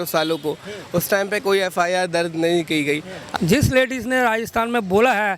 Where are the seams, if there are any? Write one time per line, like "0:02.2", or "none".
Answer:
0:03.2